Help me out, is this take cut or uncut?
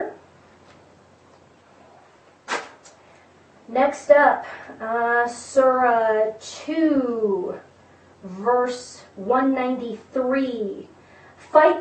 uncut